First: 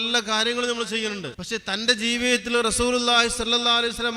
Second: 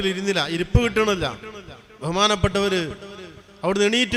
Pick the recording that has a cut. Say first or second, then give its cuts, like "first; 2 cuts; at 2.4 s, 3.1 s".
first; 1 cut; at 1.3 s